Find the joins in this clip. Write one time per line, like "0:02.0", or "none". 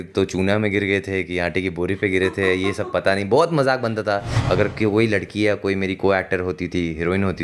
0:04.3